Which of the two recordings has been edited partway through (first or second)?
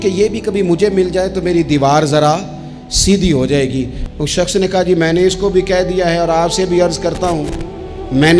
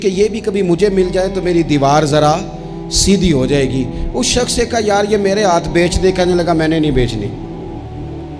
first